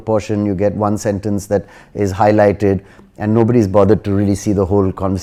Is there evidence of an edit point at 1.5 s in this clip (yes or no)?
no